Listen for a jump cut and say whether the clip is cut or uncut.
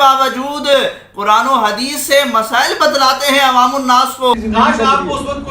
cut